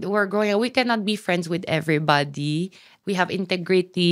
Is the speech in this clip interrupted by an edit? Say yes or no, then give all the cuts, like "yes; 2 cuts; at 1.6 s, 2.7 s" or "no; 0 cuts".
yes; 1 cut; at 3.0 s